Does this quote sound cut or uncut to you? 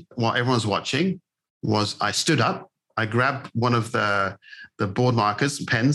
cut